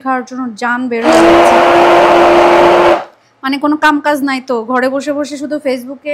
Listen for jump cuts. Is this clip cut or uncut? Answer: uncut